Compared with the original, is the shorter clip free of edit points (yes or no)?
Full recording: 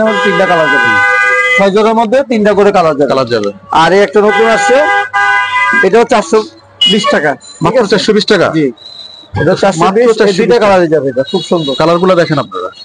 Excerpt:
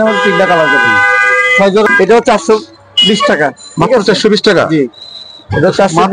no